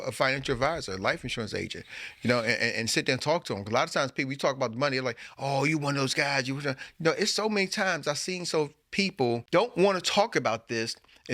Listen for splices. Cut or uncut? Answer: cut